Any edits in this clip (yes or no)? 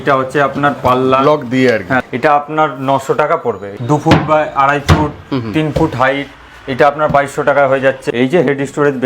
yes